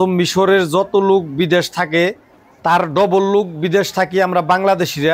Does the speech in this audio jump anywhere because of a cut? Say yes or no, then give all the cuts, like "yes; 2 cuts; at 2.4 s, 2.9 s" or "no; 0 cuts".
no; 0 cuts